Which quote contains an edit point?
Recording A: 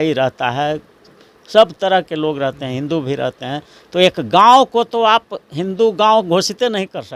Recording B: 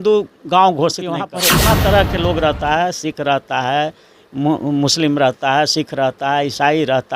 B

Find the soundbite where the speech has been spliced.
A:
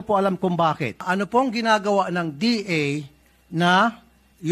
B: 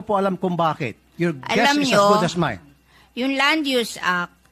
A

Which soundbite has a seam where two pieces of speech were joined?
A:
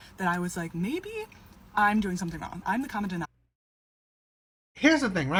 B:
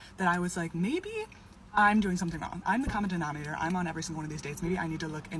B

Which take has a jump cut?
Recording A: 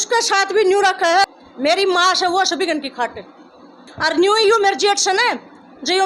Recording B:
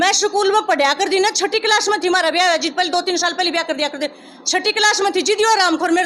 A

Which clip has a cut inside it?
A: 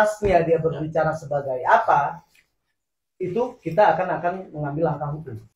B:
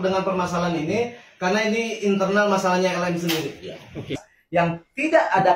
B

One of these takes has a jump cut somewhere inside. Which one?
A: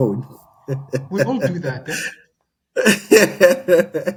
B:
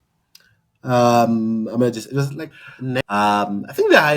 B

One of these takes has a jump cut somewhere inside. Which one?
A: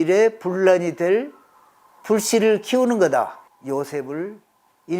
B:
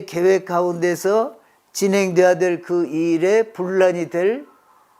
A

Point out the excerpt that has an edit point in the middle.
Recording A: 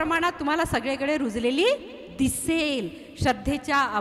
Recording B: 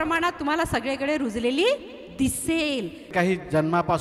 B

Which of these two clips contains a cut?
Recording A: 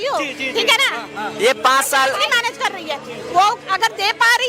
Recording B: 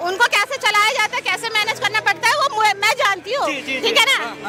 A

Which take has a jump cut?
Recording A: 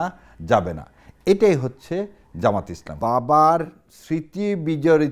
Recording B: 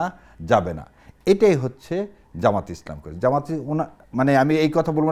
A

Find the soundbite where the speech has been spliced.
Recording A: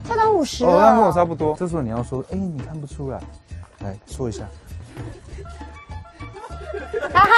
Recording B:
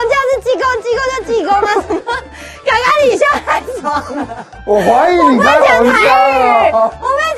A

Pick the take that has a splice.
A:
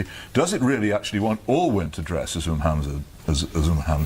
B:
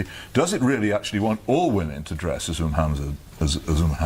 A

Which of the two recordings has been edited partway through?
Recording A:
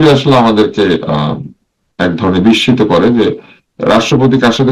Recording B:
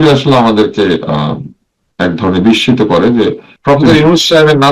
B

